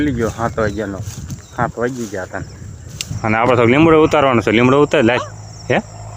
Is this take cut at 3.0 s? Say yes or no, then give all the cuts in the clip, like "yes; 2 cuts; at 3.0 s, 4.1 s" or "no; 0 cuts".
yes; 1 cut; at 3.0 s